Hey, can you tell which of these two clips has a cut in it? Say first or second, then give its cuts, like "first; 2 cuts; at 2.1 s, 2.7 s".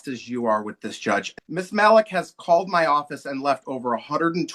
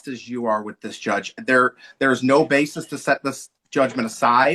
first; 1 cut; at 1.3 s